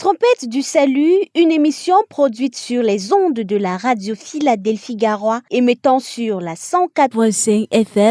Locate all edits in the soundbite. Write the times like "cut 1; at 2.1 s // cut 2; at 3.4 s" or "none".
cut 1; at 7.0 s